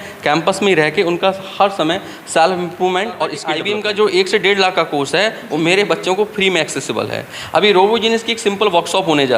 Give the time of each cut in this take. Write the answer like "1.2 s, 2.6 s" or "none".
3.5 s